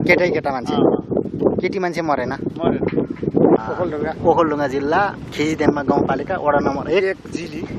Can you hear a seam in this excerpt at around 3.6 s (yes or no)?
yes